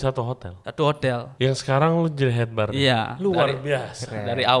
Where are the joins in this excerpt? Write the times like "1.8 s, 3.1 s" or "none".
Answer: 1.3 s